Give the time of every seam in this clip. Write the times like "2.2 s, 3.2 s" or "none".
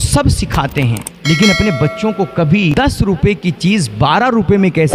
1.1 s, 2.7 s